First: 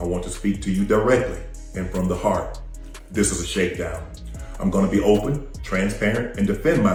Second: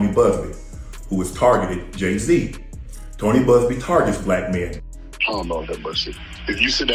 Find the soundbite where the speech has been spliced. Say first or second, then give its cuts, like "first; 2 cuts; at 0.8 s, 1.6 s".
second; 1 cut; at 4.8 s